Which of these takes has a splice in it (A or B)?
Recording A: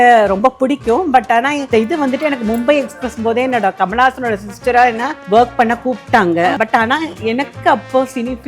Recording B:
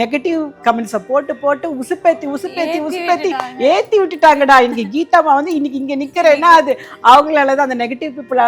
A